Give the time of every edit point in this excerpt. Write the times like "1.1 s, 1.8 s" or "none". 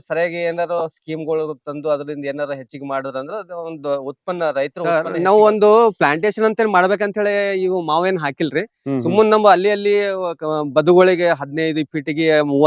5.0 s